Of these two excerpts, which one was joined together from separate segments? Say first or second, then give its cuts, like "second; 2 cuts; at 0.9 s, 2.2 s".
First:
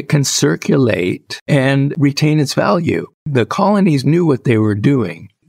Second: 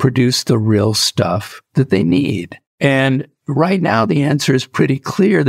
first; 2 cuts; at 1.7 s, 3.2 s